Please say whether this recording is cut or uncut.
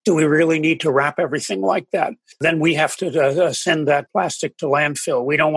cut